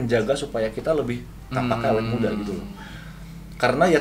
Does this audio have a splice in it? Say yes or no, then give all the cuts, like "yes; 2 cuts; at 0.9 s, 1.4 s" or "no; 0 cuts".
no; 0 cuts